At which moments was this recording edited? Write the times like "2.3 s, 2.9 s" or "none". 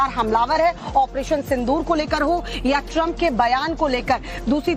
none